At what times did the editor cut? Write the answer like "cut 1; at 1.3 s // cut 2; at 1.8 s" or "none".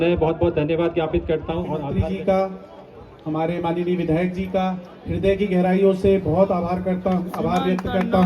cut 1; at 1.9 s